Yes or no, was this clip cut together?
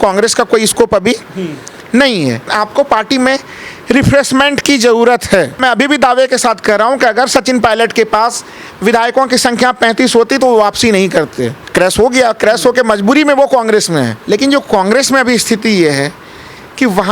yes